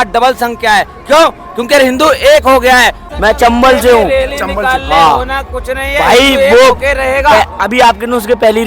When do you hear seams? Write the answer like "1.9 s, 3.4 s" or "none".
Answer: 3.0 s